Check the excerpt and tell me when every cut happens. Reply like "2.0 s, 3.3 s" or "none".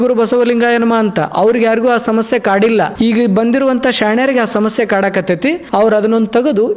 2.9 s, 5.6 s